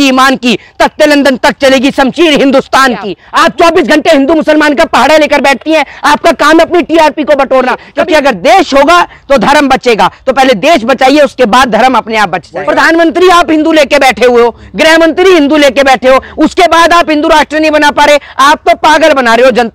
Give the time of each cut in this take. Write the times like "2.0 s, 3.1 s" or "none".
3.2 s, 7.9 s, 12.5 s